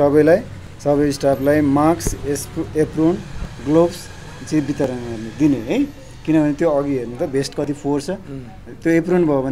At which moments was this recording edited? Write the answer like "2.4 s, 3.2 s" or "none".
none